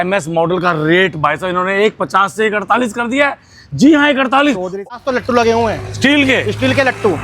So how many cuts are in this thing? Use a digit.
1